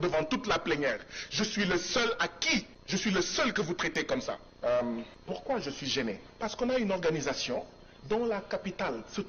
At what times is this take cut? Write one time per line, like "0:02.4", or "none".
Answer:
0:02.8
0:04.5
0:05.1
0:06.3